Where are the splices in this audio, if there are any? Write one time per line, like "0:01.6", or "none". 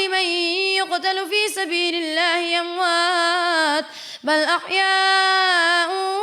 none